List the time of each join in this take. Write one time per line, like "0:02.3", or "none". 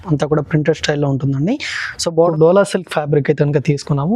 0:02.2